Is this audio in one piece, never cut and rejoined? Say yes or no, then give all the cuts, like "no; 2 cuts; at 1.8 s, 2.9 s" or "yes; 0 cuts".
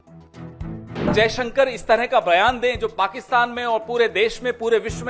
no; 1 cut; at 0.9 s